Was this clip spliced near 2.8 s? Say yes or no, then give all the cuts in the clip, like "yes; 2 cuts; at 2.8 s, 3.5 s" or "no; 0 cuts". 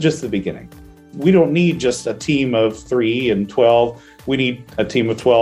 yes; 2 cuts; at 1.0 s, 2.8 s